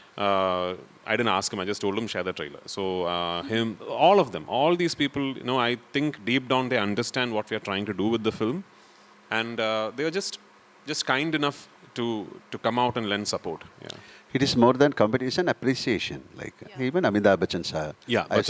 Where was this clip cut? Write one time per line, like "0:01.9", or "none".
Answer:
none